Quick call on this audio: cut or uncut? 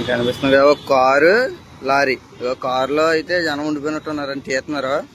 uncut